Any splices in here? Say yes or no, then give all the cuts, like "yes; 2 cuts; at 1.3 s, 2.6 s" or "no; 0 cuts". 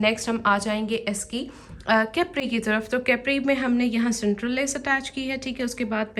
no; 0 cuts